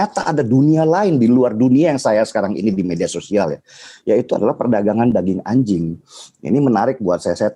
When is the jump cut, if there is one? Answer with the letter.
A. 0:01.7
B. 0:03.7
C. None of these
C